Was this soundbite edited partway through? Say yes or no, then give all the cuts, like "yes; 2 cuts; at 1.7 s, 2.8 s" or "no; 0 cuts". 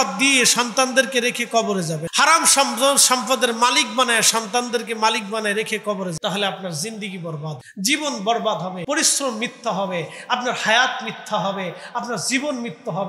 yes; 4 cuts; at 2.0 s, 6.2 s, 7.6 s, 8.8 s